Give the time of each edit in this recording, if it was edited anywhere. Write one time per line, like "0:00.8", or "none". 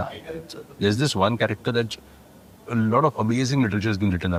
none